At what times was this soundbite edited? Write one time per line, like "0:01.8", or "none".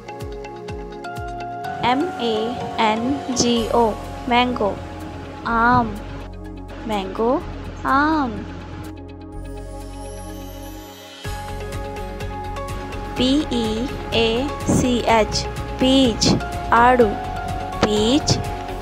0:01.5